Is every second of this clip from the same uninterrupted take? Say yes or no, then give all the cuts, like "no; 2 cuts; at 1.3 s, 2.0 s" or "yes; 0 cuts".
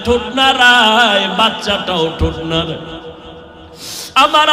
yes; 0 cuts